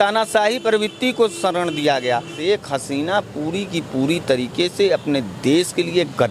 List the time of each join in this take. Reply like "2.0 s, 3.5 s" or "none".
2.3 s

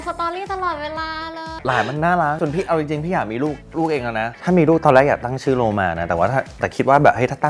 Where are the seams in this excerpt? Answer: 2.4 s, 4.3 s

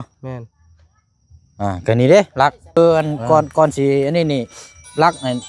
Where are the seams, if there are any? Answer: 2.8 s

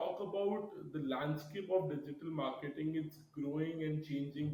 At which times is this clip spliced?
none

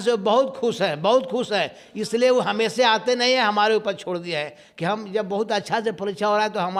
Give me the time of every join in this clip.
none

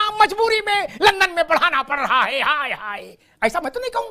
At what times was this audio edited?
none

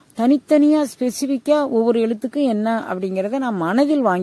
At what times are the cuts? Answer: none

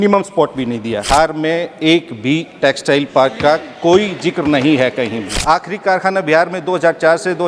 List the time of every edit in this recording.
1.1 s, 5.4 s

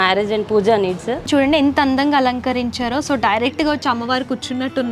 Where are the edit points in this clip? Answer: 1.3 s

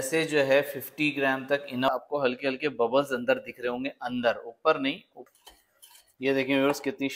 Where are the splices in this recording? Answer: 1.9 s, 5.1 s

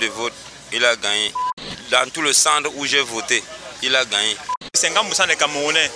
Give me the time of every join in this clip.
1.7 s, 4.8 s

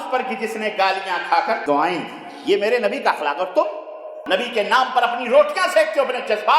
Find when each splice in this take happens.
1.6 s, 4.2 s

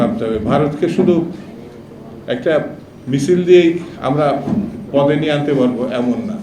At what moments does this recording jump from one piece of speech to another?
none

